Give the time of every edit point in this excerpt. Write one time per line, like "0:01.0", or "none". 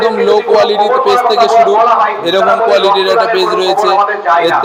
none